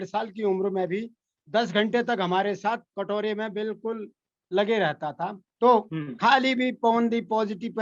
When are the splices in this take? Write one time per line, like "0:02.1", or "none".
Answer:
0:05.4